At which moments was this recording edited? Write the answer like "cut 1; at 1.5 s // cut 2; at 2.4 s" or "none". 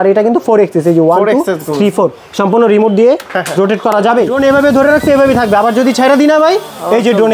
cut 1; at 4.3 s